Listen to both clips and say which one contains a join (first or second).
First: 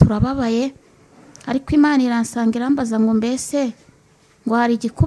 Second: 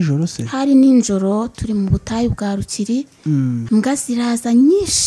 second